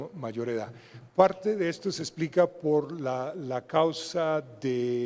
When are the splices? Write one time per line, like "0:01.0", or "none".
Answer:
0:01.4